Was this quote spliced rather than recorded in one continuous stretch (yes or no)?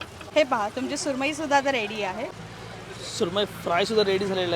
yes